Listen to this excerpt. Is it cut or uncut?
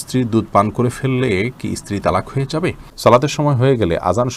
cut